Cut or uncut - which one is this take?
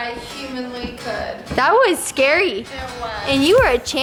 uncut